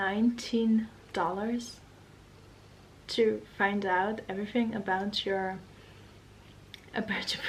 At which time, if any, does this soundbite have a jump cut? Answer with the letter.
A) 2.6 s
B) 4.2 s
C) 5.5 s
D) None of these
D